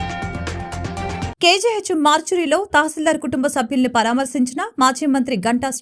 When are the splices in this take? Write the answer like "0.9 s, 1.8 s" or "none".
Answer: 1.3 s